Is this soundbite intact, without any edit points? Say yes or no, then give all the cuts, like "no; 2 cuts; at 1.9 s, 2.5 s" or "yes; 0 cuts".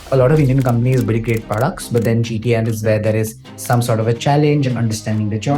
yes; 0 cuts